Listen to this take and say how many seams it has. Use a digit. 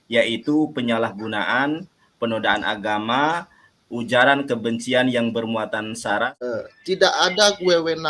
1